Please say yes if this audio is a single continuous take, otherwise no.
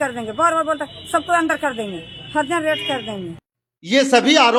yes